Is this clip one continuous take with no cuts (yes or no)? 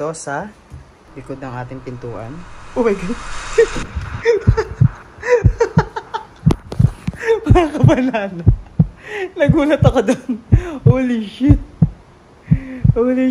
yes